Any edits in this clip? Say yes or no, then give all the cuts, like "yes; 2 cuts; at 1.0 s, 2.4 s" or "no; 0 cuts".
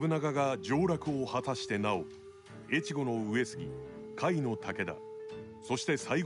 no; 0 cuts